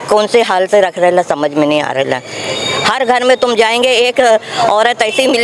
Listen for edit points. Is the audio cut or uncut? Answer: uncut